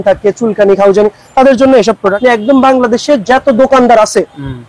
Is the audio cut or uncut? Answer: cut